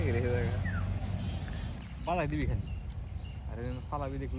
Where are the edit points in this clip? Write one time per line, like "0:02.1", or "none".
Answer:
0:01.8